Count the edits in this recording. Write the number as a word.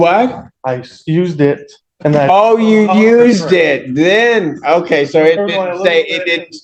zero